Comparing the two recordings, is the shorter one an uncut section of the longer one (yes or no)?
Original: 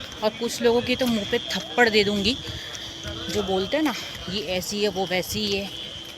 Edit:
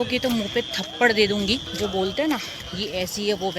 no